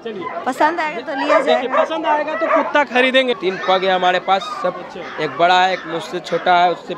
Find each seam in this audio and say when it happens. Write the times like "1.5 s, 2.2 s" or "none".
3.4 s